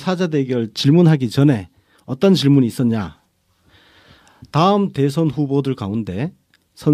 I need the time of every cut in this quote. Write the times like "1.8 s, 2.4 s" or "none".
2.4 s